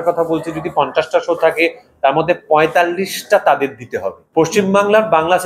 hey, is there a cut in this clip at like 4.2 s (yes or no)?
yes